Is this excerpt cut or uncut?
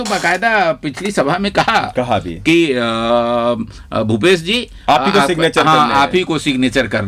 uncut